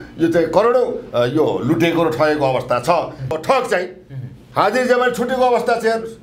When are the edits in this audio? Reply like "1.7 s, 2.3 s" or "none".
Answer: 3.3 s